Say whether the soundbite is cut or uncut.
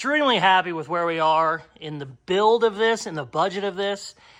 uncut